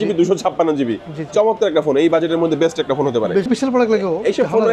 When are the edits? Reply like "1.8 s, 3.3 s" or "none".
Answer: 3.5 s